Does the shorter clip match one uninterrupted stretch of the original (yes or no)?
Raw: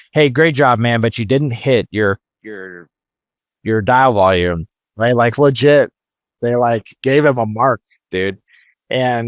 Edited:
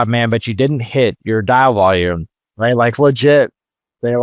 no